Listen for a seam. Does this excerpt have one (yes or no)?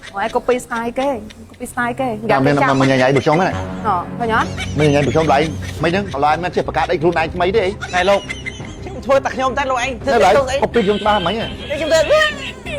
no